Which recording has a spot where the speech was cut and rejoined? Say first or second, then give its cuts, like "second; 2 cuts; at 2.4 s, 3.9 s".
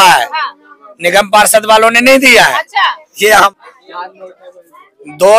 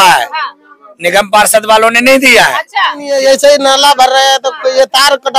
second; 1 cut; at 3.1 s